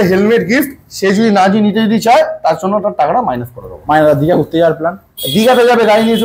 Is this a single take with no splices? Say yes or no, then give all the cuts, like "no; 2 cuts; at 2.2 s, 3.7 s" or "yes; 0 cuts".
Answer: yes; 0 cuts